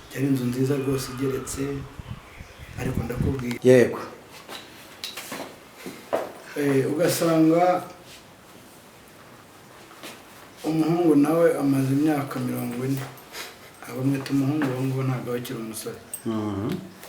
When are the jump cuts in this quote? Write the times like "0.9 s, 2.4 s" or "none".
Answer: 3.5 s